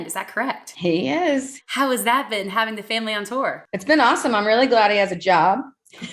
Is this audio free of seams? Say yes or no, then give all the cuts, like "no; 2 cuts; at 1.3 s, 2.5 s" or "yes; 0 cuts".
no; 1 cut; at 1.6 s